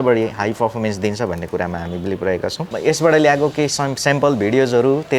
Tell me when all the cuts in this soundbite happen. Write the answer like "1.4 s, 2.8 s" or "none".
2.7 s